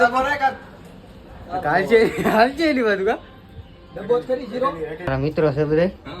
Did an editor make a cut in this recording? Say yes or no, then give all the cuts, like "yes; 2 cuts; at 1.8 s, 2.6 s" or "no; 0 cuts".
yes; 1 cut; at 5.1 s